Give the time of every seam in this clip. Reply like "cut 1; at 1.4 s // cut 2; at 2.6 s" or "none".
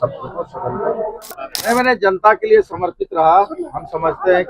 cut 1; at 1.4 s